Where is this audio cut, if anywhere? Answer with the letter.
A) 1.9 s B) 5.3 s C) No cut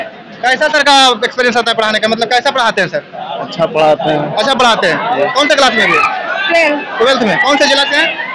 B